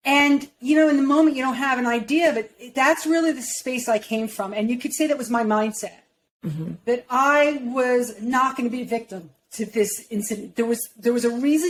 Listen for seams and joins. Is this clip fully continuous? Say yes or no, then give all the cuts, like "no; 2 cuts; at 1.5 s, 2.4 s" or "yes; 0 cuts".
yes; 0 cuts